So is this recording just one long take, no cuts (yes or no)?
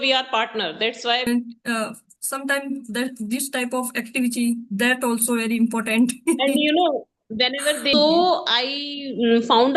no